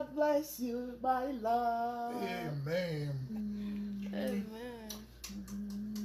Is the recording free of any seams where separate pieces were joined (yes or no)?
no